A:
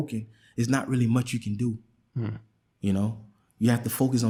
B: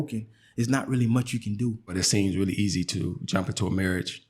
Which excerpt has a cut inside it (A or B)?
B